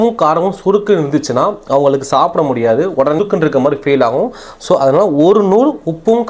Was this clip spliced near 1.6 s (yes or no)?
no